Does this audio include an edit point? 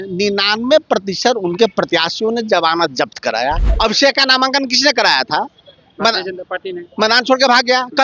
yes; 1 cut; at 3.7 s

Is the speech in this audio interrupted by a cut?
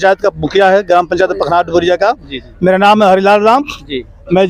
no; 0 cuts

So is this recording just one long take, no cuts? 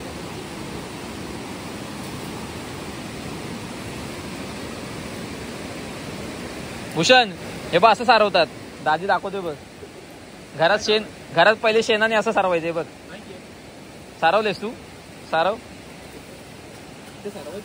yes; 0 cuts

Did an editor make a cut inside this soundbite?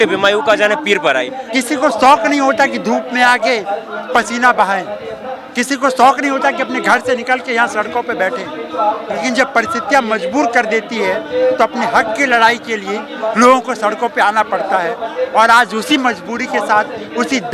yes; 1 cut; at 1.4 s

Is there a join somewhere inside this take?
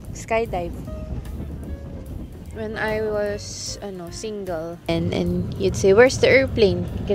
yes; 1 cut; at 4.9 s

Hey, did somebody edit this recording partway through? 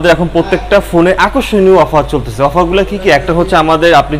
no; 0 cuts

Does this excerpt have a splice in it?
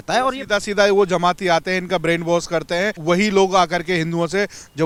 no; 0 cuts

